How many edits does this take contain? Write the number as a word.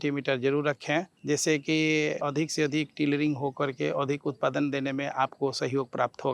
two